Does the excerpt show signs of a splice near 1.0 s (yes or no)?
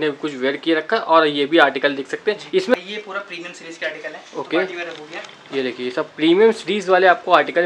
no